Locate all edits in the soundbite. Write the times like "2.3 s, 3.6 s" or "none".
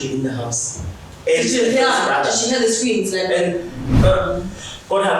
3.8 s